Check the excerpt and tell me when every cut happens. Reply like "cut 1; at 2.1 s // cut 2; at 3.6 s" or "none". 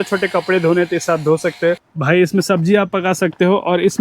cut 1; at 1.9 s